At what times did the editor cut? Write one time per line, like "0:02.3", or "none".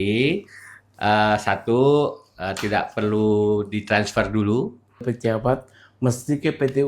0:05.0